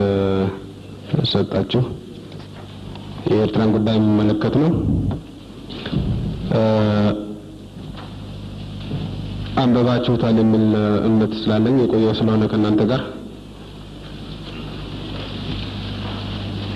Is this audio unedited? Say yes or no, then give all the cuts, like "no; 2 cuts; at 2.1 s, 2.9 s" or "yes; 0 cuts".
yes; 0 cuts